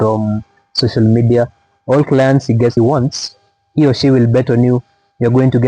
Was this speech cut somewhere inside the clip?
yes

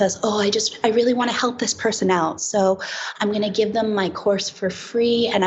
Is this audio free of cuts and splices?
yes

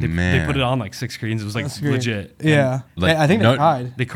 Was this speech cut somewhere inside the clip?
yes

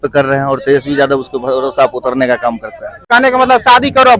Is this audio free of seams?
no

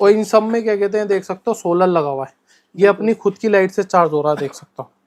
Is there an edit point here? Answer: no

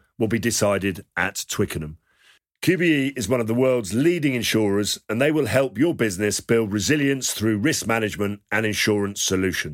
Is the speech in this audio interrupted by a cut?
no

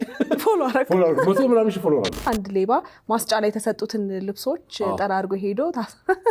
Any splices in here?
yes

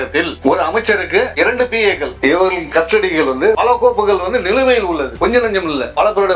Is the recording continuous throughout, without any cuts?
no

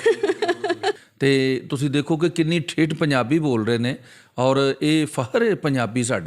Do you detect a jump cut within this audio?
yes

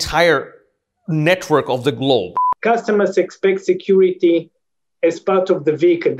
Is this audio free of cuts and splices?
no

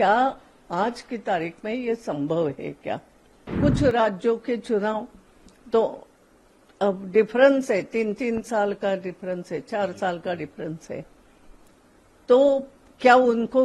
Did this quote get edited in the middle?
yes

